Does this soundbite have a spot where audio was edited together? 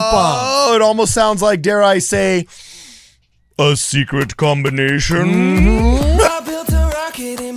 yes; 1 cut; at 6.3 s

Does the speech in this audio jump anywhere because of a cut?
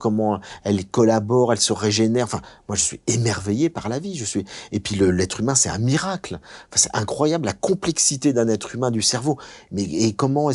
no; 0 cuts

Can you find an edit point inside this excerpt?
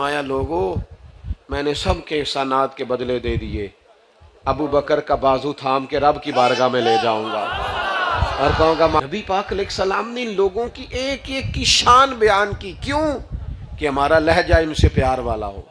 yes; 1 cut; at 9.0 s

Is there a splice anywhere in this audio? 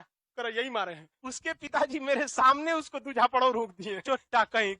yes; 2 cuts; at 1.1 s, 3.9 s

